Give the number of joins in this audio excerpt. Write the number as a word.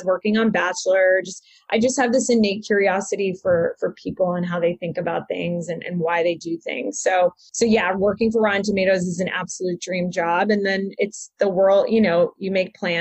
one